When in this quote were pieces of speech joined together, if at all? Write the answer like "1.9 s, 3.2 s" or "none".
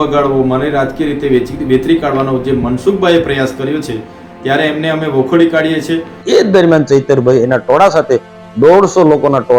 6.2 s